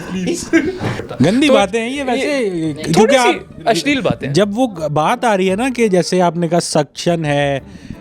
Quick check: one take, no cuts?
no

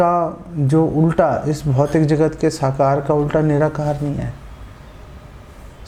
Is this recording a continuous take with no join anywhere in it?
yes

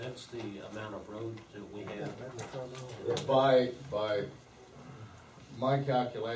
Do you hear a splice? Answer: yes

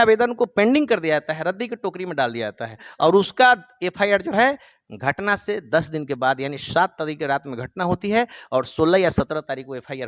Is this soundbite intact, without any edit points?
yes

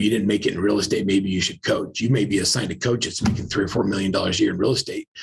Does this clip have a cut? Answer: no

